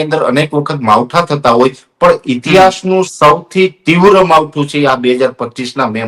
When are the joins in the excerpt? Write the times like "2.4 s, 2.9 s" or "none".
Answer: none